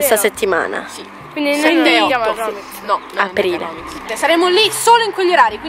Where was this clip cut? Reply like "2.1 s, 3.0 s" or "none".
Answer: 4.0 s

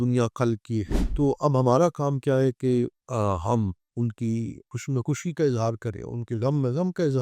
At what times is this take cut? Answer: 4.7 s

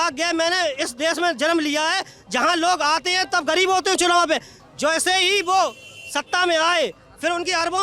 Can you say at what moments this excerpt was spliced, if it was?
none

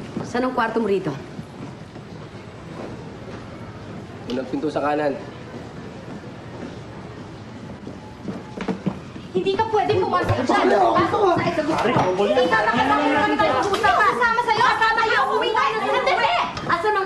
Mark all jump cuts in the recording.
9.5 s

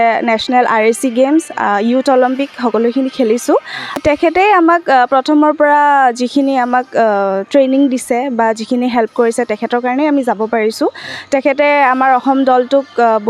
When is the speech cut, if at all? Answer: 4.0 s

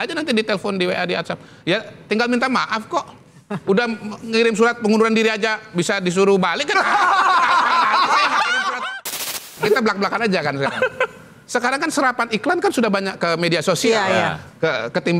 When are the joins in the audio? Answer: 9.3 s

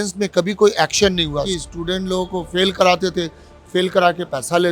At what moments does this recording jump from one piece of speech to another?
1.5 s

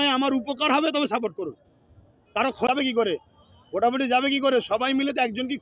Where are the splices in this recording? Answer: 2.7 s

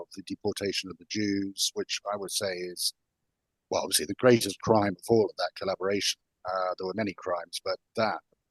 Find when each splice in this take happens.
none

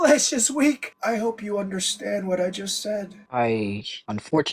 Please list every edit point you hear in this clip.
none

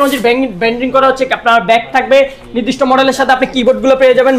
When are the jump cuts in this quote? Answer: none

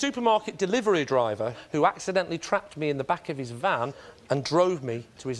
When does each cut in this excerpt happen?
none

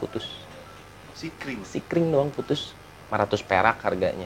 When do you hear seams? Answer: none

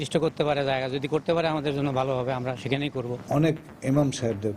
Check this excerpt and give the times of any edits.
3.2 s

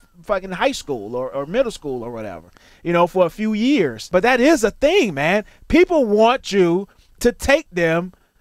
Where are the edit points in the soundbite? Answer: 4.0 s

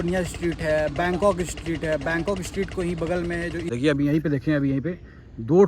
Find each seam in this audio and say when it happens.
3.7 s

